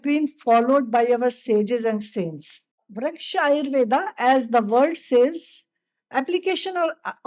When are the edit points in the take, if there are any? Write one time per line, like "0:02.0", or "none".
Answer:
0:02.8